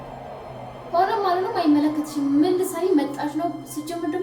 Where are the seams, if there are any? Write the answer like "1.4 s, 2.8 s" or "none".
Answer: 0.9 s